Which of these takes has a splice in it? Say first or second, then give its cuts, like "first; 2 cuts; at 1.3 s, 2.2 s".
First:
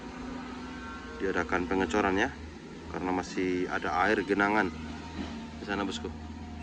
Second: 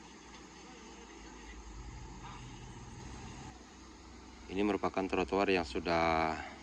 second; 1 cut; at 3.5 s